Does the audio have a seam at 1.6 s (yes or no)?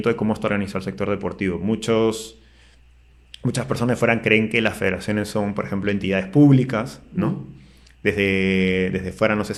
no